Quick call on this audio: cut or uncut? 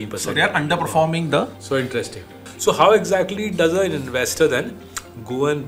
cut